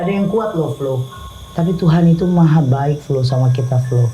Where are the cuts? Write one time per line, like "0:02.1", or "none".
0:01.2